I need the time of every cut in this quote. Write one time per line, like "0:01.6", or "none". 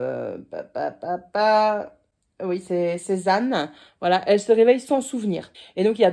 none